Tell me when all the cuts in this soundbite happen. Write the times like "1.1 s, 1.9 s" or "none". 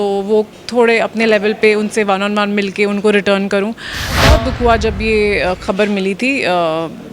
4.1 s